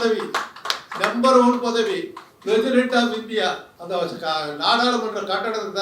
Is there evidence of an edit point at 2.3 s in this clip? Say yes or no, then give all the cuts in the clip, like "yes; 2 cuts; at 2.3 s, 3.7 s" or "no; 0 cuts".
no; 1 cut; at 3.7 s